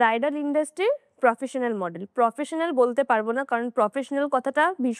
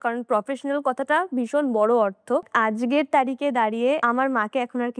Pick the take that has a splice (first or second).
second